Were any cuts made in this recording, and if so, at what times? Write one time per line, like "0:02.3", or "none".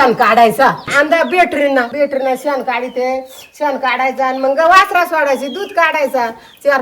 0:00.8
0:01.9